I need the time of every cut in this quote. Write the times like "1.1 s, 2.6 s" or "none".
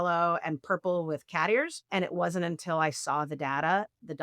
1.9 s